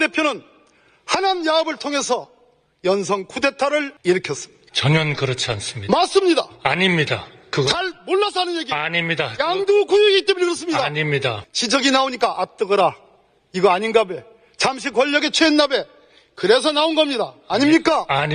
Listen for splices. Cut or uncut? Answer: cut